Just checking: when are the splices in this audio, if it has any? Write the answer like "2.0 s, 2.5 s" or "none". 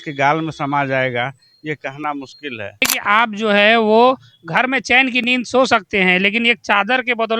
3.0 s